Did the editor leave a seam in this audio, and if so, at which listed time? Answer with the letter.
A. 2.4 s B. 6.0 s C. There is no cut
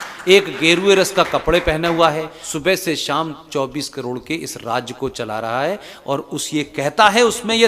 A